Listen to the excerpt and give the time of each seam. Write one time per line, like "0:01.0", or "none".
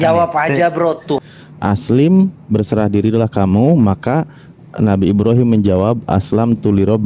0:01.2